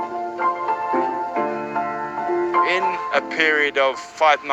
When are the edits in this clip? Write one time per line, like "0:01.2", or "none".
0:00.9